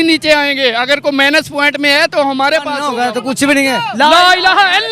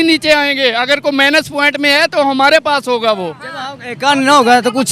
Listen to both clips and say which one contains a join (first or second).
first